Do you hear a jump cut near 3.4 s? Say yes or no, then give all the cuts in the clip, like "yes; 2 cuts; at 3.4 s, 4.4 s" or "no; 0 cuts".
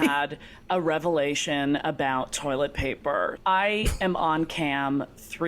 yes; 1 cut; at 3.4 s